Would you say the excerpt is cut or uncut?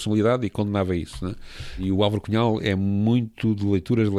uncut